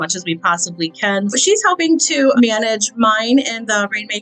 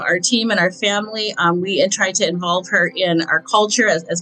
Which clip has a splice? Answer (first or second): first